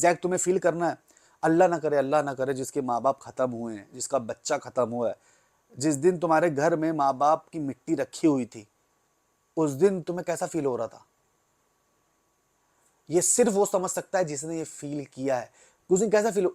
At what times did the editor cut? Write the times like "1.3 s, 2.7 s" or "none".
5.8 s